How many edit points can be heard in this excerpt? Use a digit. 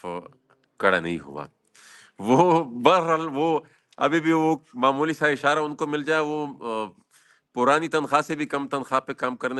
0